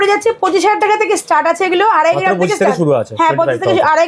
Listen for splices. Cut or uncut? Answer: uncut